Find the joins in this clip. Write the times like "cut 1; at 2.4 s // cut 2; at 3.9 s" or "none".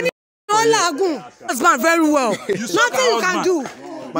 cut 1; at 1.6 s